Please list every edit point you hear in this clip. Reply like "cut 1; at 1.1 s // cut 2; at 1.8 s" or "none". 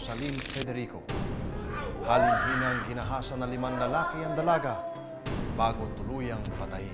cut 1; at 3.3 s